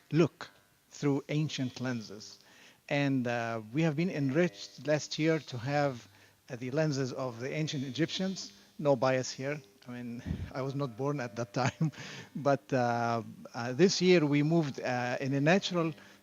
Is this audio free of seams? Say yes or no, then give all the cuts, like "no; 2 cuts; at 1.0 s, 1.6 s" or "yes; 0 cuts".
yes; 0 cuts